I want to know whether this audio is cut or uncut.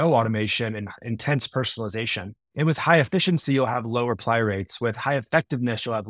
cut